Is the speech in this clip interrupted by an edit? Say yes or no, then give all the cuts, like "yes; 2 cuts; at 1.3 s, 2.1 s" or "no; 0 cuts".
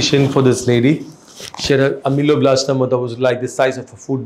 no; 0 cuts